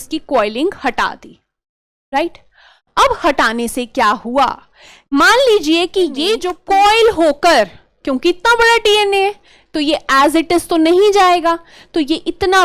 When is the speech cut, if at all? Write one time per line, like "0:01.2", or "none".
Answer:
0:06.5